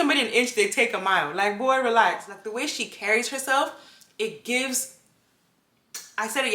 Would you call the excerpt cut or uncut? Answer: cut